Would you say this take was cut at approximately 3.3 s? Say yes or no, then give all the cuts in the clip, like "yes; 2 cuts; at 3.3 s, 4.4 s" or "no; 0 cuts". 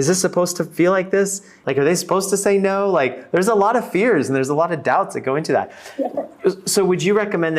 no; 1 cut; at 1.6 s